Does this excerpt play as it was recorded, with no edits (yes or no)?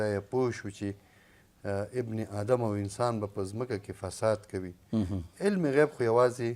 yes